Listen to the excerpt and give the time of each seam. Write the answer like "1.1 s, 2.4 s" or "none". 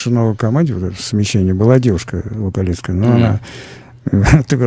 none